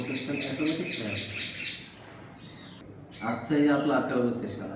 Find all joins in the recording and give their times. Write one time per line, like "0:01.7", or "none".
0:02.8